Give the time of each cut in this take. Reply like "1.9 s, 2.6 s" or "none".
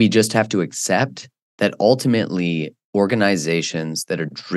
none

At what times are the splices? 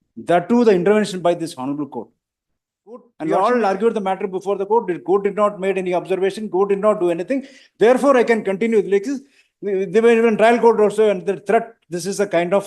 3.1 s

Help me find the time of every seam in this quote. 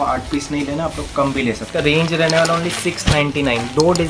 1.7 s

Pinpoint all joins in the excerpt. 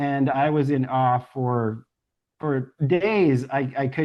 none

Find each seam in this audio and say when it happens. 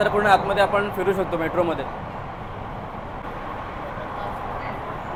none

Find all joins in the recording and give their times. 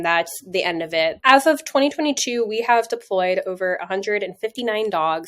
1.2 s

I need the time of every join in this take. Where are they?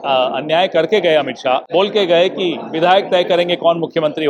1.6 s

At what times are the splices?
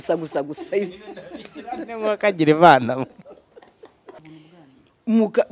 4.2 s

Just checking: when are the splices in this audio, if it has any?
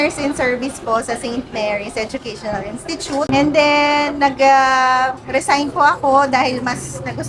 none

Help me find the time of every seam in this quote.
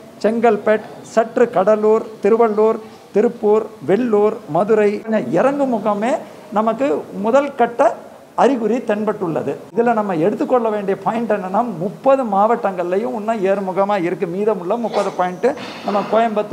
5.0 s, 9.7 s

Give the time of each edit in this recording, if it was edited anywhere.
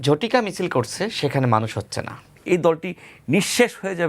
2.4 s

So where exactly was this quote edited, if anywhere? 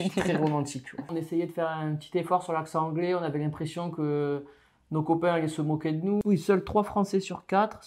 1.2 s, 6.2 s

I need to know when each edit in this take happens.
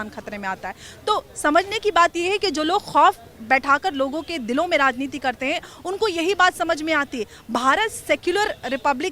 none

